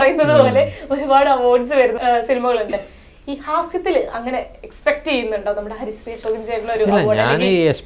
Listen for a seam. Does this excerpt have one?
yes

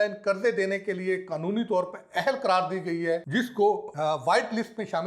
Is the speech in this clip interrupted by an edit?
yes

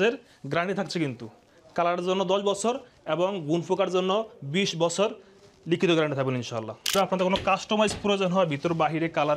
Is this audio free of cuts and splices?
no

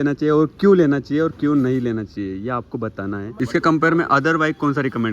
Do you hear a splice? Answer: yes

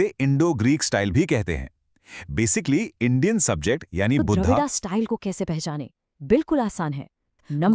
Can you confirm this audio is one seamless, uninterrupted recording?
no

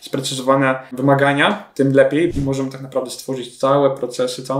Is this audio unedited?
no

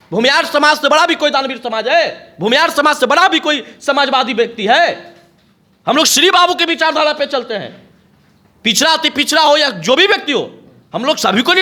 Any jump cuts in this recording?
no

